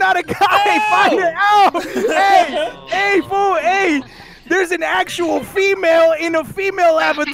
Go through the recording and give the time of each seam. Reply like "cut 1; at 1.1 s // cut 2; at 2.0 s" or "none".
none